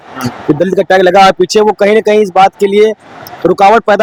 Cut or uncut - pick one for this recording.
uncut